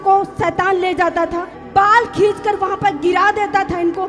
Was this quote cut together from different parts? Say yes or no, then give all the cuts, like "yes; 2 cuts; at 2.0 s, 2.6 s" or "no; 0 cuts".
yes; 1 cut; at 1.5 s